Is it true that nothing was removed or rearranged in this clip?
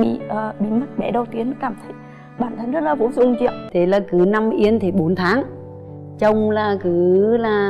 no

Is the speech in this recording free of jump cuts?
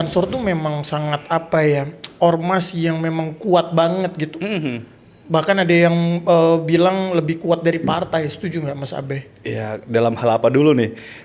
yes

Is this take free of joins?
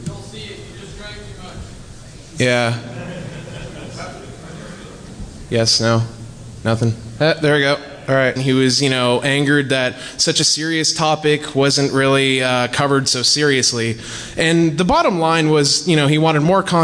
yes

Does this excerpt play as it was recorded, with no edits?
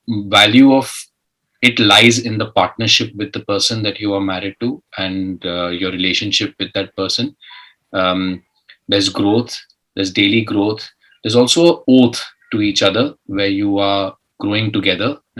yes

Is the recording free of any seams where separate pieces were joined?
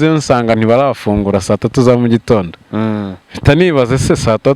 yes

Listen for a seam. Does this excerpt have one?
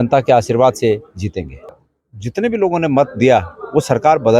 yes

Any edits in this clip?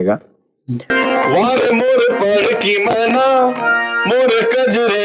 yes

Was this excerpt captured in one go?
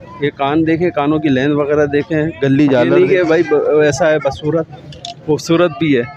no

